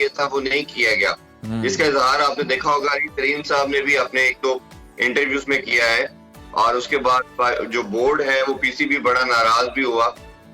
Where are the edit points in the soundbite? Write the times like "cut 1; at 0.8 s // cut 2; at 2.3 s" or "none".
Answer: none